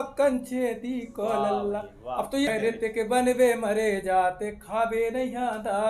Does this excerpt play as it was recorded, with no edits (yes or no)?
no